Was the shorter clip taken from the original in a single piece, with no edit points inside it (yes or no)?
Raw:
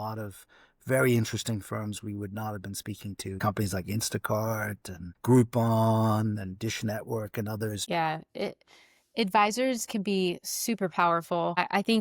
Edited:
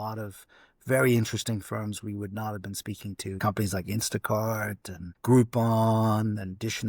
yes